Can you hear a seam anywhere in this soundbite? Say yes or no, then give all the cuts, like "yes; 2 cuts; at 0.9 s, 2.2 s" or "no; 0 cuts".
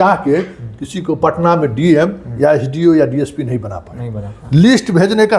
no; 0 cuts